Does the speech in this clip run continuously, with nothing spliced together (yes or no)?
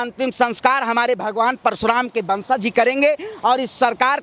yes